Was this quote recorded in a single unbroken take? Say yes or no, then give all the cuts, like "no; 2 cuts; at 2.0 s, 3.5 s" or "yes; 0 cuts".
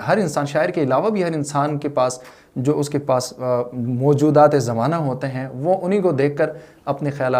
yes; 0 cuts